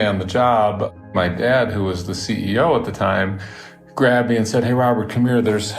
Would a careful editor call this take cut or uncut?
cut